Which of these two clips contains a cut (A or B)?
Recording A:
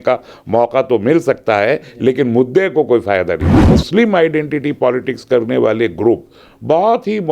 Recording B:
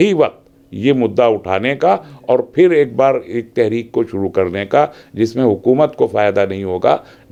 A